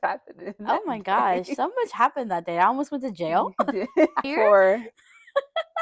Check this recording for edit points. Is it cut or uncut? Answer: cut